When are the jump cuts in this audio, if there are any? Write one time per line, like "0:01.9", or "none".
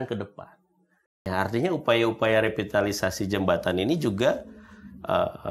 0:01.3